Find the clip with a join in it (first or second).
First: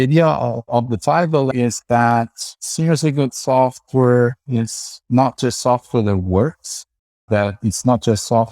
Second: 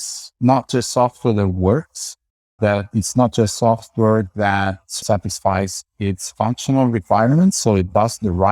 first